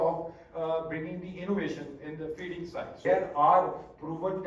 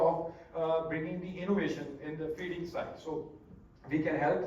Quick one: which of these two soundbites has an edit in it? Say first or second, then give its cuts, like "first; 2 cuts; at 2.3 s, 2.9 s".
first; 1 cut; at 3.0 s